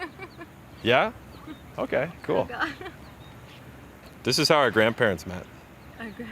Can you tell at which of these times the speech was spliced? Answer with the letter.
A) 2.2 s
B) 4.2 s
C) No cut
B